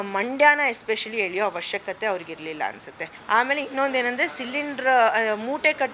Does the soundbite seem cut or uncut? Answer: cut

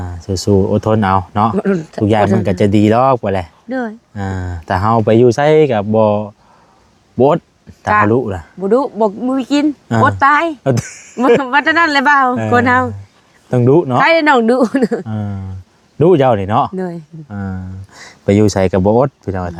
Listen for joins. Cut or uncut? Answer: uncut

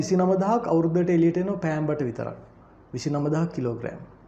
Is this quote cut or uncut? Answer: uncut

